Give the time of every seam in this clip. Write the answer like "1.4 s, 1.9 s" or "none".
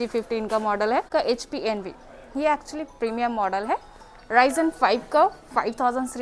1.1 s